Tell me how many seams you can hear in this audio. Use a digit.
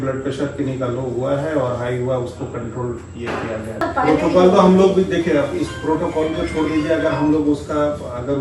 1